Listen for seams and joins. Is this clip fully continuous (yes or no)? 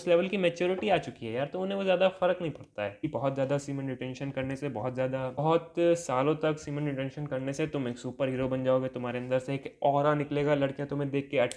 no